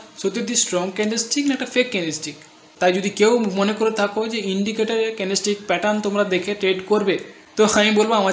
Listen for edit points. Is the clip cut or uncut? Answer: cut